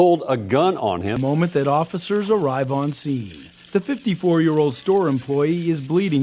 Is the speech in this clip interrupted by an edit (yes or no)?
yes